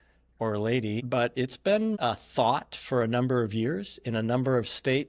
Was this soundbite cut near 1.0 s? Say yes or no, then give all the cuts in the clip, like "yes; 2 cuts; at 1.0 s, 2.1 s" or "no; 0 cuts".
yes; 1 cut; at 1.0 s